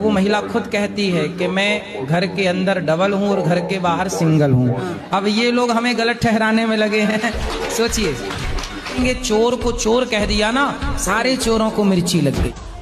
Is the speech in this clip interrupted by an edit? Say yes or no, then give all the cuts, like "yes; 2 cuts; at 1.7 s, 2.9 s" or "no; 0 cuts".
no; 0 cuts